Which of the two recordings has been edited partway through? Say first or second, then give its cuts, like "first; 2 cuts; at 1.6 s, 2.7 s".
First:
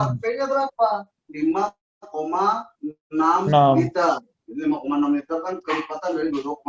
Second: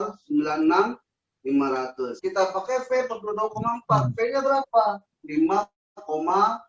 second; 1 cut; at 2.1 s